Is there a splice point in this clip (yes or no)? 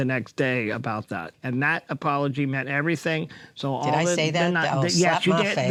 no